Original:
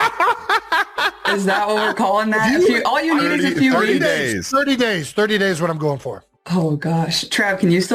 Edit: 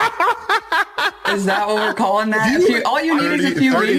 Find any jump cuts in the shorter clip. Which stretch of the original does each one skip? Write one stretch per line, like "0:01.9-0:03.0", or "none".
none